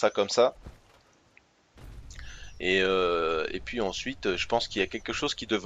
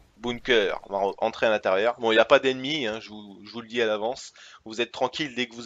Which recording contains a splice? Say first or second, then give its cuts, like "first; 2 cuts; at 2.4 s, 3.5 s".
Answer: first; 1 cut; at 3.6 s